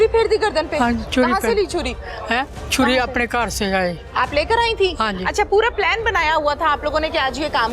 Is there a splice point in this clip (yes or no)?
no